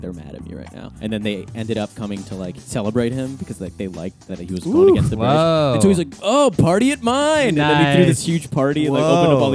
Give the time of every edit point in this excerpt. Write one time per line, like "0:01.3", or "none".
0:00.9
0:02.6
0:04.2